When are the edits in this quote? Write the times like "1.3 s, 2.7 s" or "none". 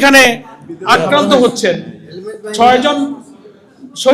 none